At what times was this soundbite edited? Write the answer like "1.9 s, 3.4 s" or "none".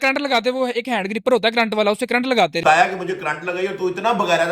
2.6 s